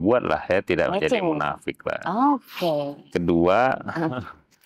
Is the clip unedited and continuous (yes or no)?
yes